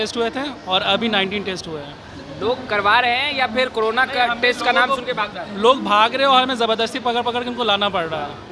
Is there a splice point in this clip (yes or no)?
no